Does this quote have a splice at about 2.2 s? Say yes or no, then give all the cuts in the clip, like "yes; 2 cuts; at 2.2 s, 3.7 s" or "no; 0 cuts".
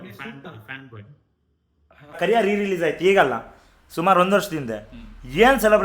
yes; 1 cut; at 2.2 s